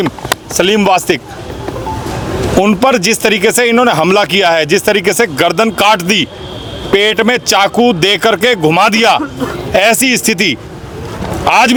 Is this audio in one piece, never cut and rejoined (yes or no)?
yes